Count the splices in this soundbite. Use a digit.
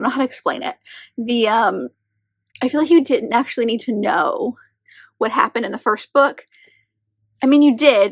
0